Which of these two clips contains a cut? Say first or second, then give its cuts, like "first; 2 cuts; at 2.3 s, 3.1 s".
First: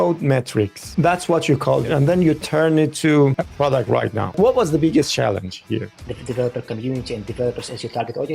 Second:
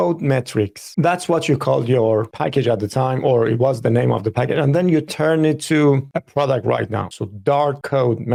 first; 3 cuts; at 1.9 s, 3.7 s, 5.9 s